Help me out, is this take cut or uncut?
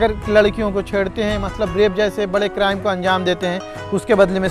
uncut